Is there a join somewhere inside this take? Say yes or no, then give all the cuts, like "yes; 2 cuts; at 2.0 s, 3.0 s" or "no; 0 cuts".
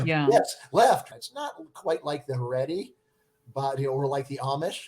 yes; 1 cut; at 1.0 s